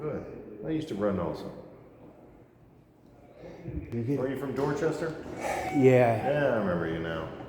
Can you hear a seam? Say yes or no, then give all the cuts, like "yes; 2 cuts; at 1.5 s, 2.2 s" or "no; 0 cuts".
yes; 1 cut; at 4.0 s